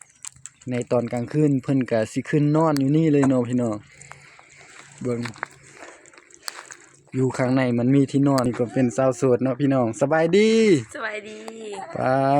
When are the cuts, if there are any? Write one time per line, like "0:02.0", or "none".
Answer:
0:08.5